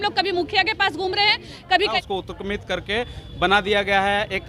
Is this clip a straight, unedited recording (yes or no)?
no